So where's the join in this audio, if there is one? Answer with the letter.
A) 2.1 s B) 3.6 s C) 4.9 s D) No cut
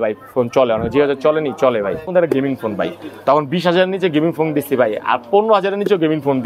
A